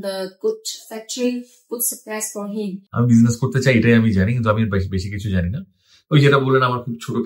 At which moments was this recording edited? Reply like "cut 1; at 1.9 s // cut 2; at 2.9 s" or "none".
cut 1; at 2.9 s